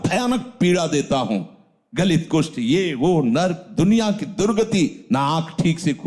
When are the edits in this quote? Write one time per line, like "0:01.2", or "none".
none